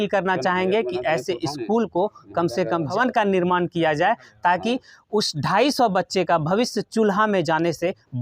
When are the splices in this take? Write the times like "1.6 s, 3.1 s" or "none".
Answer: 2.9 s